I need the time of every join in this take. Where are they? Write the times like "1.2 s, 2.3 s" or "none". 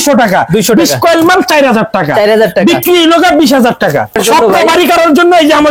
4.2 s